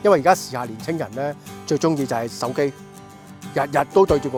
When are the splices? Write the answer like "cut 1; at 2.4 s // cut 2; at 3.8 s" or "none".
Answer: none